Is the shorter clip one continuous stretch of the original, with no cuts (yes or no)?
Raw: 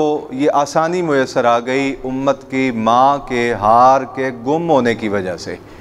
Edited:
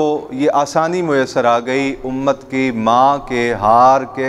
yes